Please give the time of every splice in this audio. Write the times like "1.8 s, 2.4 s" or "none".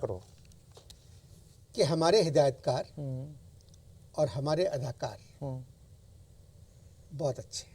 1.5 s